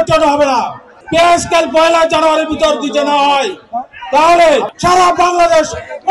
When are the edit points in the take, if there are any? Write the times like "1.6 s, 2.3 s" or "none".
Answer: 0.9 s, 4.7 s